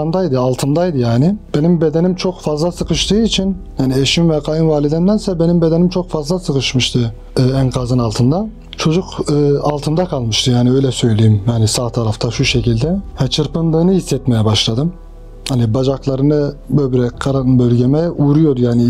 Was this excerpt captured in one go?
yes; 0 cuts

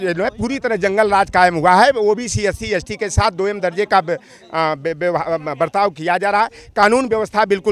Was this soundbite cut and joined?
no; 0 cuts

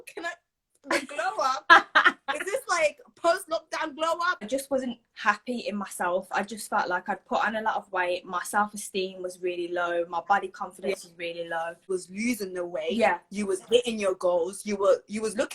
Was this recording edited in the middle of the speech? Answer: yes; 2 cuts; at 4.5 s, 11.8 s

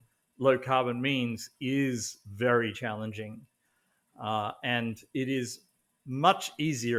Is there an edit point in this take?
no; 0 cuts

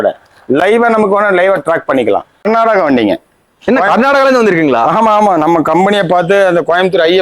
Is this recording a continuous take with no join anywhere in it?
no; 1 cut; at 2.4 s

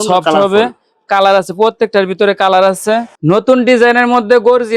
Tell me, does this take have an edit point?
yes; 1 cut; at 3.2 s

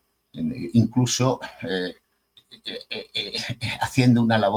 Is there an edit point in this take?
no; 0 cuts

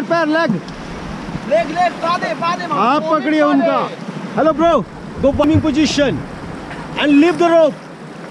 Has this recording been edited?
yes; 1 cut; at 5.4 s

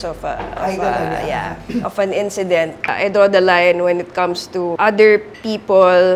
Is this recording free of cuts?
no; 2 cuts; at 2.9 s, 4.7 s

